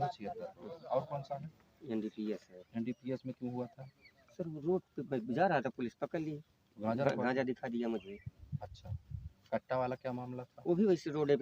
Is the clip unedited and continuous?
yes; 0 cuts

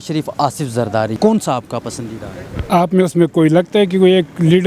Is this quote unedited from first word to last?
no; 1 cut; at 1.2 s

